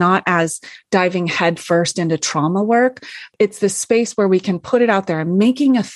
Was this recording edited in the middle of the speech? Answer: yes; 1 cut; at 3.2 s

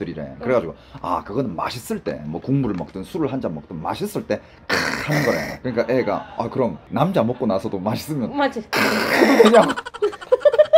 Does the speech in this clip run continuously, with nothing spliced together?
yes; 0 cuts

